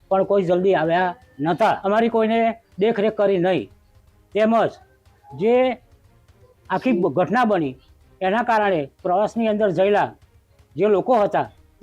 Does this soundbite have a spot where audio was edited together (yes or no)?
yes